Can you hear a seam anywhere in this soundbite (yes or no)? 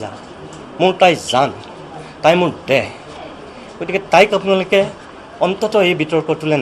no